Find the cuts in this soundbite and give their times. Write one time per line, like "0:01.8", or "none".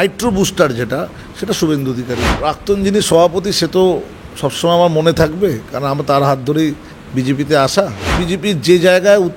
0:02.3
0:08.2